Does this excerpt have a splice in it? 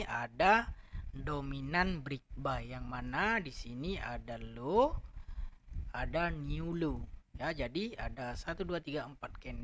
no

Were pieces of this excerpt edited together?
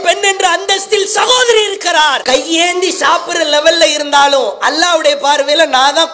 no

